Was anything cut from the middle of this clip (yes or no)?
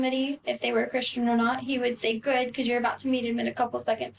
no